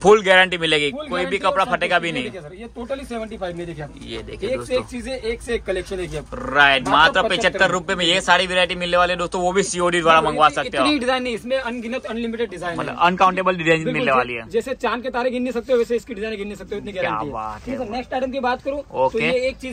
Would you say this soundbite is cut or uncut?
uncut